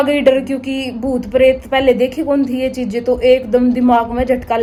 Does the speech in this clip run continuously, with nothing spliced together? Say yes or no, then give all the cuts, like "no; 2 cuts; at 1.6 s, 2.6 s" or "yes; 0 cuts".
yes; 0 cuts